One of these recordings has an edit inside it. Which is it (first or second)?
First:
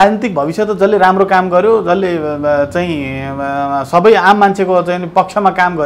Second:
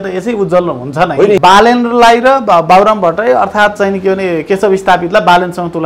second